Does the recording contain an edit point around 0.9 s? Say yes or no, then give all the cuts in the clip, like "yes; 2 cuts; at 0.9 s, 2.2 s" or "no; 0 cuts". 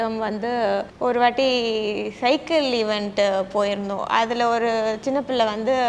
yes; 1 cut; at 0.9 s